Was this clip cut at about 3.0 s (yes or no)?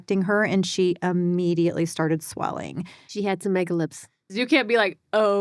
yes